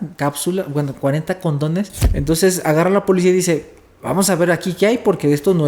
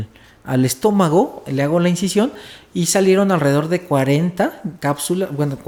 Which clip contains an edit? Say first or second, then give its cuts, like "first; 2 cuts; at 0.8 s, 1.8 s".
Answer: first; 1 cut; at 2.0 s